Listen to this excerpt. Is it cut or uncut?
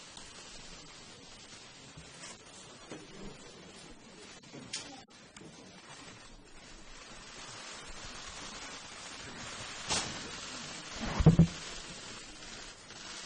uncut